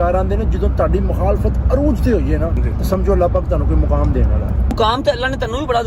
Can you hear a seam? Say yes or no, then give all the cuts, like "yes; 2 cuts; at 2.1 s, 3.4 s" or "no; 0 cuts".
yes; 2 cuts; at 2.6 s, 4.7 s